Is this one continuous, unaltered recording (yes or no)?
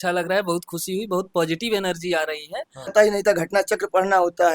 no